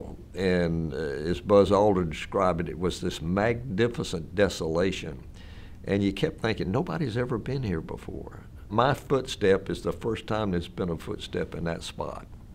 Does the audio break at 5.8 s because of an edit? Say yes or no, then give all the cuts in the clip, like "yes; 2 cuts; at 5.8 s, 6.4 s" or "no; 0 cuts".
no; 1 cut; at 8.7 s